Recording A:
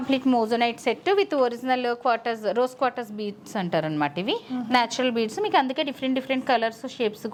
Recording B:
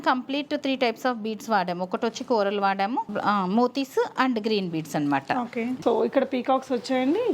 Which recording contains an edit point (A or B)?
B